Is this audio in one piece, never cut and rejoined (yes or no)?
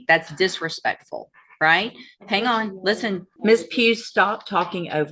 no